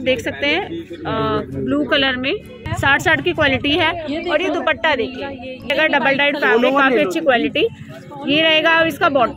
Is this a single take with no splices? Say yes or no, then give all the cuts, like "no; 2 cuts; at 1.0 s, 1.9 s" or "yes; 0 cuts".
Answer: no; 2 cuts; at 2.6 s, 5.7 s